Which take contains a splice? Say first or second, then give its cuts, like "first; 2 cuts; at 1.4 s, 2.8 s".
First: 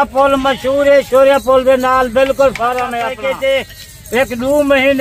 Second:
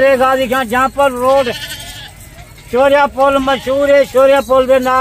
first; 1 cut; at 3.1 s